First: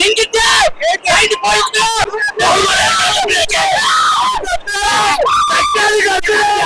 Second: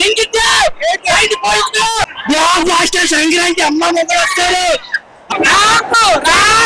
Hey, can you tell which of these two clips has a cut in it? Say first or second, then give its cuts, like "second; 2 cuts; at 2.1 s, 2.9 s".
first; 1 cut; at 2.1 s